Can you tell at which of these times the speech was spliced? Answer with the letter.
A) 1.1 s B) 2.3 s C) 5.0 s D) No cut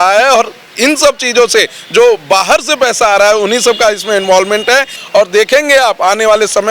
C